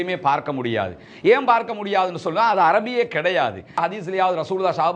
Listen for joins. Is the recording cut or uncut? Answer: cut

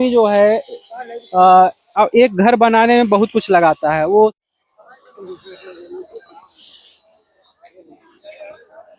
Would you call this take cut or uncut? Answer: cut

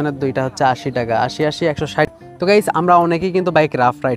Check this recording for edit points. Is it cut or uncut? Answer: cut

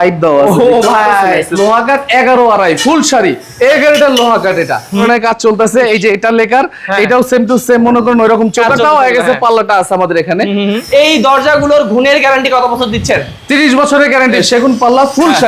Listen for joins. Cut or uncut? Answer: cut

